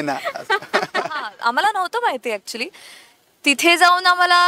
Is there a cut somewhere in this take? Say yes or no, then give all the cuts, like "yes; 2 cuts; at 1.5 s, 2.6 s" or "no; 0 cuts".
yes; 1 cut; at 1.3 s